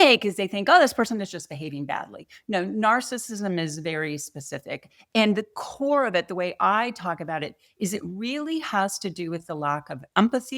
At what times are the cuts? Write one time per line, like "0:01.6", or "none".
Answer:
none